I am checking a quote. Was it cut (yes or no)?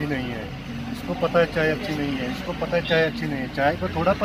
no